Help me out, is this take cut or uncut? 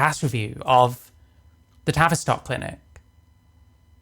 uncut